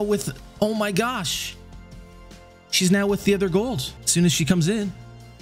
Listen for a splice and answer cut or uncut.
uncut